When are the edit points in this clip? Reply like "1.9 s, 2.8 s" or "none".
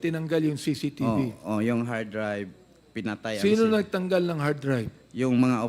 none